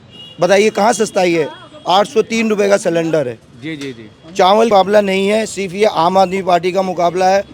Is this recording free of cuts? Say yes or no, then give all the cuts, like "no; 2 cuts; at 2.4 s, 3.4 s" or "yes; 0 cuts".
no; 1 cut; at 4.7 s